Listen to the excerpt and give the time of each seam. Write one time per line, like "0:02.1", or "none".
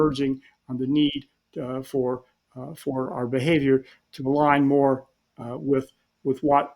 0:03.1